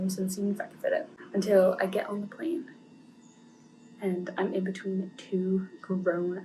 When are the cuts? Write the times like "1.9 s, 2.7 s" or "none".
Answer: 1.2 s